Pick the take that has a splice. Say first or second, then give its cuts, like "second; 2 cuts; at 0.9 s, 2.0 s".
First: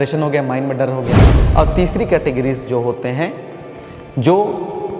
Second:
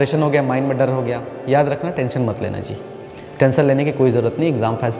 first; 1 cut; at 1.3 s